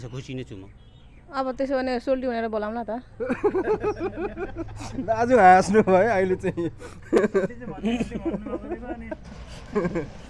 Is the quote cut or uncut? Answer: uncut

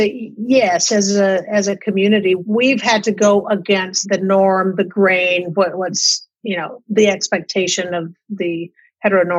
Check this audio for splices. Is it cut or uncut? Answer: cut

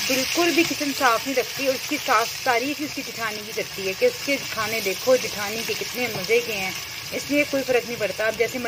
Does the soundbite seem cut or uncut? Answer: uncut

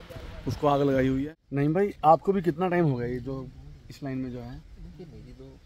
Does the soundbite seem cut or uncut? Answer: cut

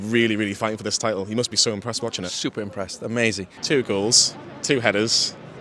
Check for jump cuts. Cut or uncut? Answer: cut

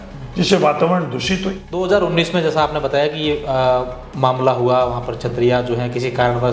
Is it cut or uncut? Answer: cut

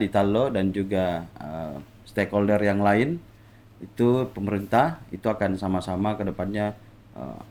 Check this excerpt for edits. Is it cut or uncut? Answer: uncut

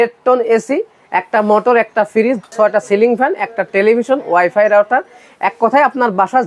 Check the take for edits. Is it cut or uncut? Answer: cut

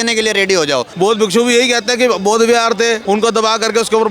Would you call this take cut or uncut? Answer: cut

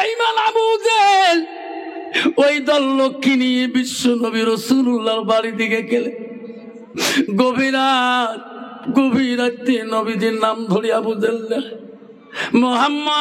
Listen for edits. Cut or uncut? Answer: uncut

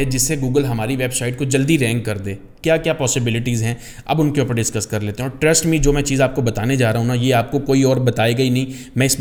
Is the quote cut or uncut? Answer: uncut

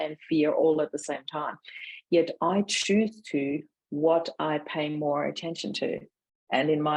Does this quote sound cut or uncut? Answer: uncut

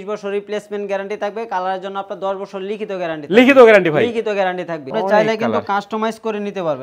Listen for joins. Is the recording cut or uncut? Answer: cut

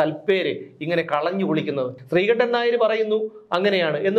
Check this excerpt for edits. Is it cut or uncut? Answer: cut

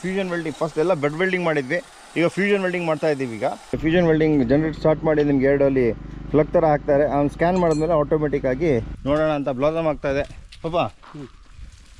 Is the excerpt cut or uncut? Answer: cut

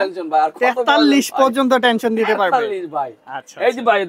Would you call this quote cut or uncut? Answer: uncut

